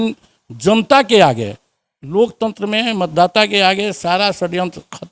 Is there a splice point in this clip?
no; 0 cuts

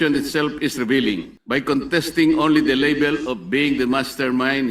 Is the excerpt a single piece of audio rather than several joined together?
no; 1 cut; at 1.3 s

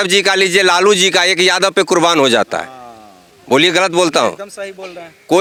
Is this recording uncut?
yes; 0 cuts

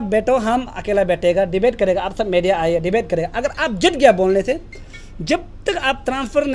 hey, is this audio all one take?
yes; 0 cuts

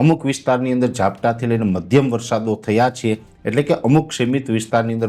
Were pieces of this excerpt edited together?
no; 0 cuts

